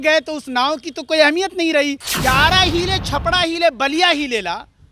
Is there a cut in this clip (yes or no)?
yes